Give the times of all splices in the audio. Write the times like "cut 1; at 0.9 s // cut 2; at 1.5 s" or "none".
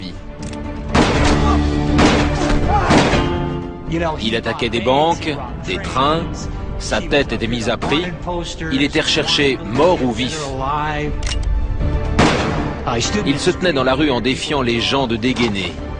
cut 1; at 13.8 s